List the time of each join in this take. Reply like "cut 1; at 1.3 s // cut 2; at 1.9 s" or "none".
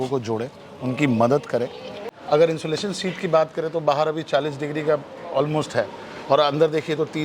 cut 1; at 1.8 s